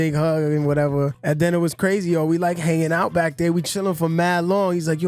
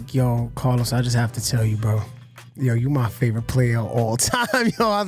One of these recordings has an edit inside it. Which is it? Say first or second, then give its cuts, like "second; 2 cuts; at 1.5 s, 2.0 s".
first; 1 cut; at 1.2 s